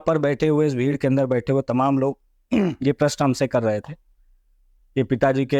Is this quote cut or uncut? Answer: uncut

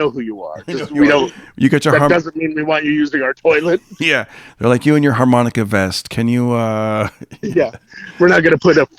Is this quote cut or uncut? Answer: uncut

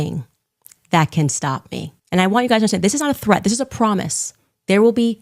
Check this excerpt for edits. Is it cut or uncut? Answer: cut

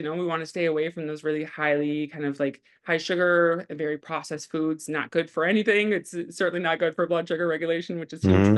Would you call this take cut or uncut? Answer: uncut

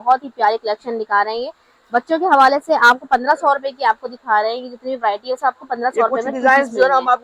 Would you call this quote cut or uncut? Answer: uncut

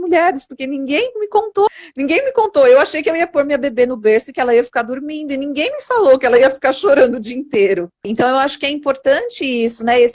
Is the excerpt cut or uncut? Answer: cut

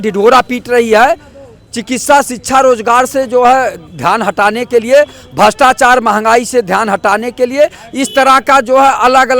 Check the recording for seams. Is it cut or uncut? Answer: uncut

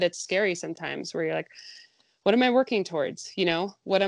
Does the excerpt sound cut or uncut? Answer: uncut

